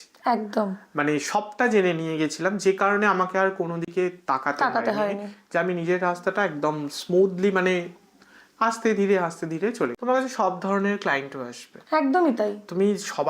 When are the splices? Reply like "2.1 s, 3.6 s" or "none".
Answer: 10.0 s